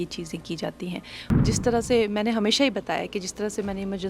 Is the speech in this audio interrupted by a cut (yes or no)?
yes